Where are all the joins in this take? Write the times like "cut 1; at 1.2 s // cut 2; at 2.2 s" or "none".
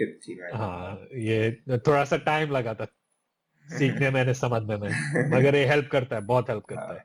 none